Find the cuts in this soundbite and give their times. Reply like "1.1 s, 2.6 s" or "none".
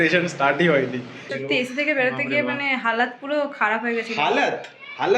1.3 s